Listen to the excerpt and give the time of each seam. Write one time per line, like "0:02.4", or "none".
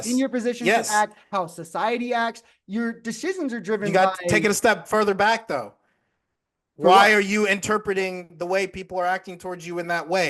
none